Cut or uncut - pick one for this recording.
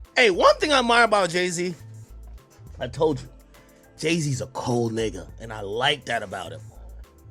uncut